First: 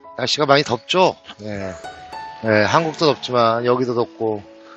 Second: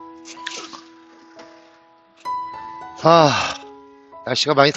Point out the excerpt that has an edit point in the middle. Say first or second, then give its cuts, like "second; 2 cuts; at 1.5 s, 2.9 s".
second; 1 cut; at 2.9 s